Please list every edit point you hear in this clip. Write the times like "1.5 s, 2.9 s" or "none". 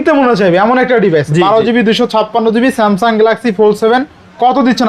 none